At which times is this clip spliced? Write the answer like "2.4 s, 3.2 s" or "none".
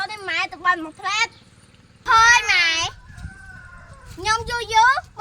1.4 s